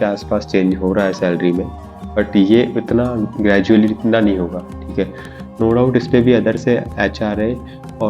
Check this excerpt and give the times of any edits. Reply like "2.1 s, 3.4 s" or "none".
none